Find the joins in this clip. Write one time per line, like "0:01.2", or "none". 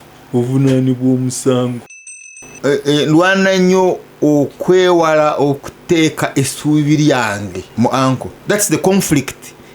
0:01.9
0:07.6
0:08.3